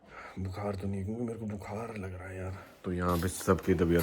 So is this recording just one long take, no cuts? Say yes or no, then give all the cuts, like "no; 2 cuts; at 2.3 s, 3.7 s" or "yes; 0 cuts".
no; 1 cut; at 2.4 s